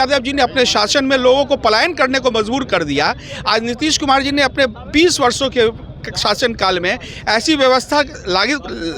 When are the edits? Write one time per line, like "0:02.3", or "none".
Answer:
none